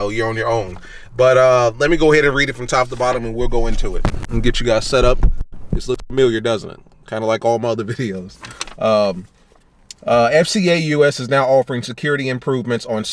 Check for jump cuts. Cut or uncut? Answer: uncut